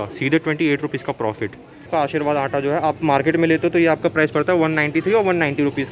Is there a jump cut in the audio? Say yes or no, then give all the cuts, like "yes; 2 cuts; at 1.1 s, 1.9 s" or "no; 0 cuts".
yes; 1 cut; at 1.9 s